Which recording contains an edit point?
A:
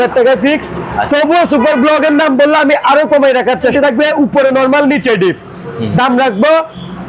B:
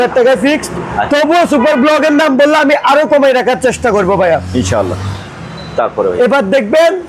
A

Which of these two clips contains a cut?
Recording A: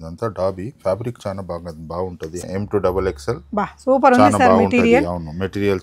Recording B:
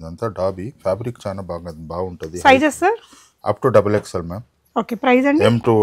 A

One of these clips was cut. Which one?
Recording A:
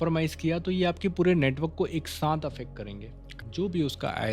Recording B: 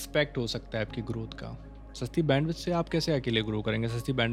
A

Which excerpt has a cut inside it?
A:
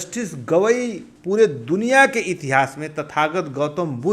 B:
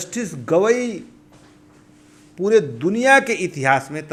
A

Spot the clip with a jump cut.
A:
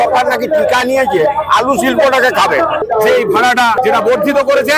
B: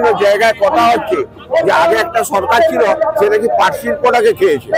A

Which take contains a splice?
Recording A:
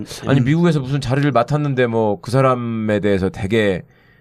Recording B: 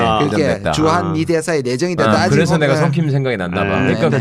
B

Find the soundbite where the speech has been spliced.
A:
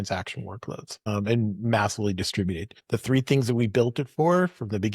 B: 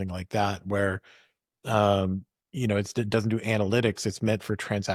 A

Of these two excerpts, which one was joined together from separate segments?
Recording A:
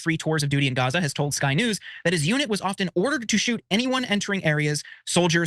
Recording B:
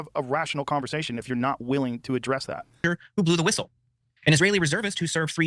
B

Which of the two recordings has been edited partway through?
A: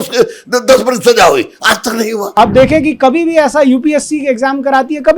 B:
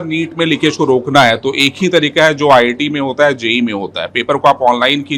A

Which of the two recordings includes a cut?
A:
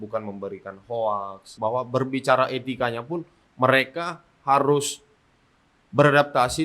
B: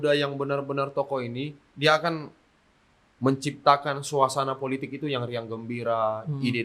A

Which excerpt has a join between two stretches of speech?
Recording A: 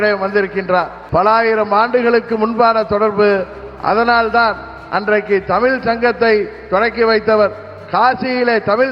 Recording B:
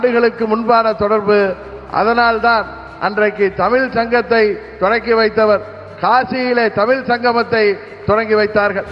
A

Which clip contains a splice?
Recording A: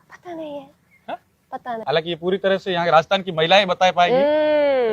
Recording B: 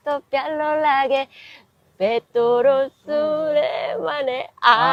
A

